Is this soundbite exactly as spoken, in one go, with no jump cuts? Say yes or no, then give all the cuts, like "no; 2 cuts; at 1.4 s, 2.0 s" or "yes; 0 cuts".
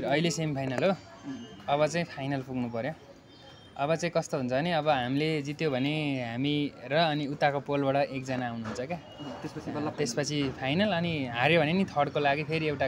yes; 0 cuts